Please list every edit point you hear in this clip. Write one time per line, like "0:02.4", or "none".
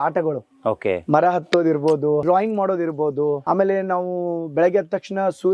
0:02.2
0:03.4